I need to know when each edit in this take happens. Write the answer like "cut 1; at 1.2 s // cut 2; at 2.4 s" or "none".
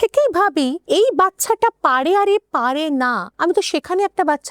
cut 1; at 0.8 s // cut 2; at 3.2 s

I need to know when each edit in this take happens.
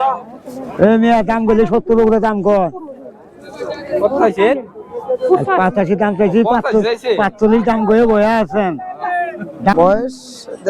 cut 1; at 9.7 s

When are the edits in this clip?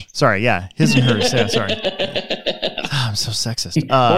cut 1; at 2.9 s

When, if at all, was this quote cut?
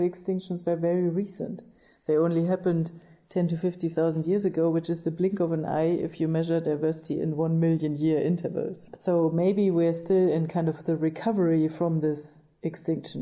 cut 1; at 8.9 s

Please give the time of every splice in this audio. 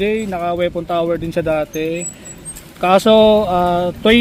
none

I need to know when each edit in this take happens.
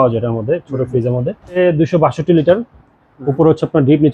cut 1; at 1.6 s

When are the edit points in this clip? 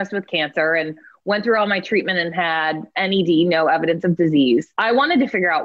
cut 1; at 2.9 s // cut 2; at 4.7 s

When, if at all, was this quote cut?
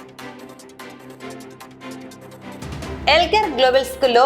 cut 1; at 0.9 s // cut 2; at 2.0 s

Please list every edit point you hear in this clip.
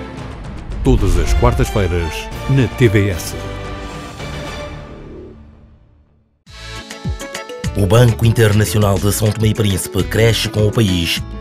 cut 1; at 6.1 s

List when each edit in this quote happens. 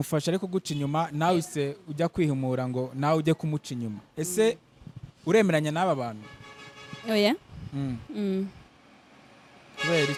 none

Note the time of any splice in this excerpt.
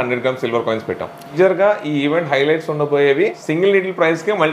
cut 1; at 1.3 s // cut 2; at 3.4 s

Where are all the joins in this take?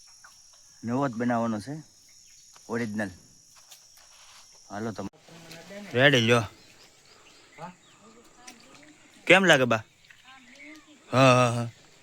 cut 1; at 5.1 s

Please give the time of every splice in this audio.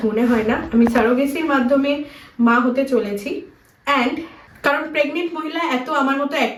none

